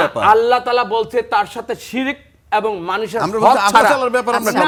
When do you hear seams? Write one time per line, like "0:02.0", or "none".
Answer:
none